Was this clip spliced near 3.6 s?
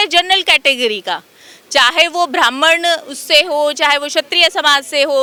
no; 0 cuts

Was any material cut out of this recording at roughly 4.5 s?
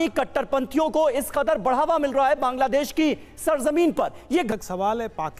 yes; 1 cut; at 4.5 s

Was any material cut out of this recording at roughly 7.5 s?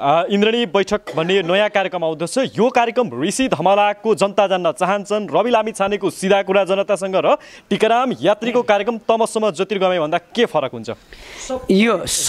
no; 0 cuts

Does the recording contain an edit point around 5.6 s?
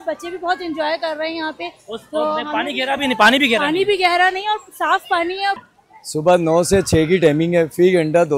yes; 1 cut; at 5.6 s

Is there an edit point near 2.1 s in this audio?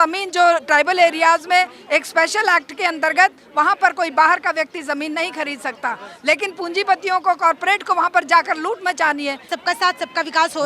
no; 1 cut; at 9.5 s

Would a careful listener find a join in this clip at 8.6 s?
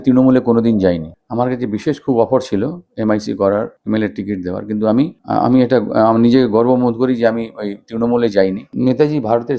yes; 1 cut; at 8.6 s

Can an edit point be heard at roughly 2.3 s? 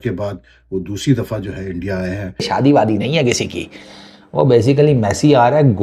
yes; 1 cut; at 2.3 s

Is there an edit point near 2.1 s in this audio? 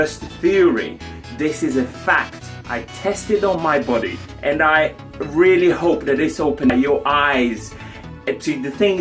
no; 2 cuts; at 4.2 s, 6.7 s

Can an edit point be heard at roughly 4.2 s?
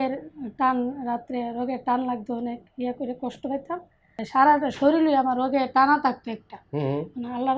yes; 1 cut; at 4.2 s

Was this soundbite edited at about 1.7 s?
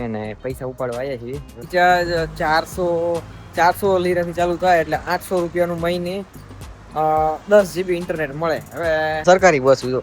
yes; 2 cuts; at 1.7 s, 9.2 s

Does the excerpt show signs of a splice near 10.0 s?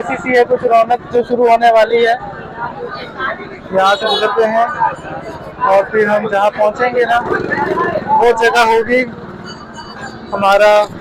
no; 0 cuts

